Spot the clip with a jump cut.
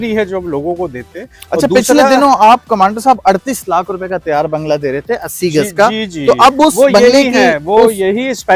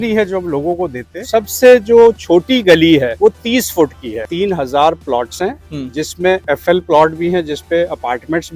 second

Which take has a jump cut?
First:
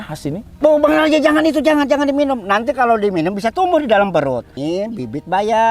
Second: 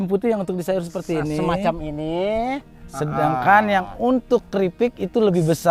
first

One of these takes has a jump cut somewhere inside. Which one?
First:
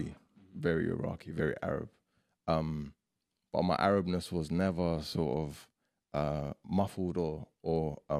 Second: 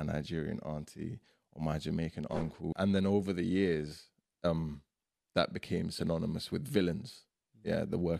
second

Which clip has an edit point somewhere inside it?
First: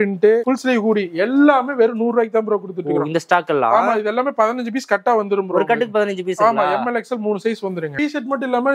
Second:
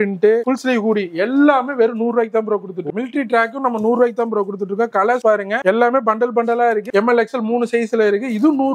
second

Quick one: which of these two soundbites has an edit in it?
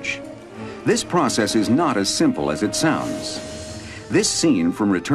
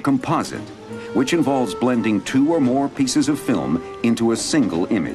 second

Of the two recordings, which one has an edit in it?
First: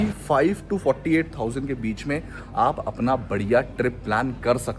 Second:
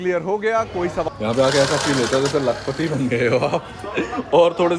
second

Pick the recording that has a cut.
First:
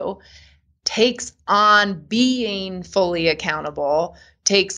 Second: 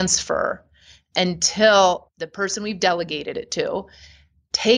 second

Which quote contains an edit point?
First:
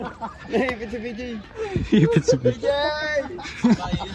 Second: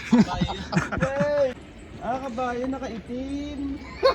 second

